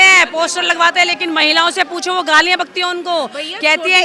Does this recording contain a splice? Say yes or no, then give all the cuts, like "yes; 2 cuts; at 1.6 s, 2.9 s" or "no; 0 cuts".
no; 0 cuts